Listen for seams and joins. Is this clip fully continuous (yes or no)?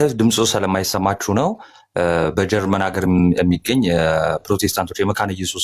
yes